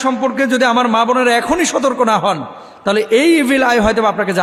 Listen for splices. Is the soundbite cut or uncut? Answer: uncut